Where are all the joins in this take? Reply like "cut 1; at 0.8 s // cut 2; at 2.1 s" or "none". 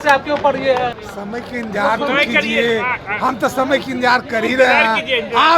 cut 1; at 1.0 s

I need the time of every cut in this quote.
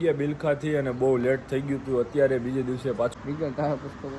cut 1; at 3.1 s

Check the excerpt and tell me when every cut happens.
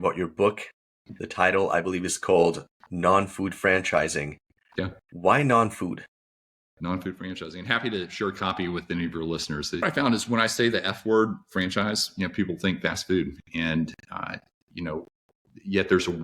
cut 1; at 9.8 s

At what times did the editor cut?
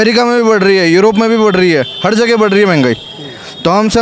none

